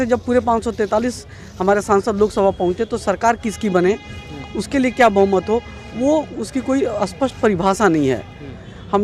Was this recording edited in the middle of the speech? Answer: no; 0 cuts

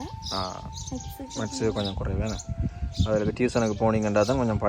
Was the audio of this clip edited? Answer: no; 0 cuts

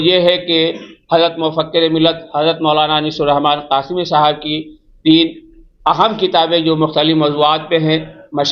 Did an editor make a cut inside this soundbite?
no; 0 cuts

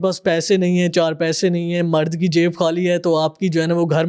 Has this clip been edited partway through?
no; 0 cuts

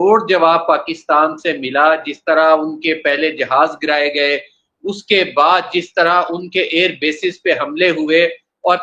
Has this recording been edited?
no; 0 cuts

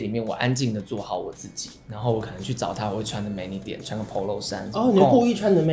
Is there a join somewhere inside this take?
no; 0 cuts

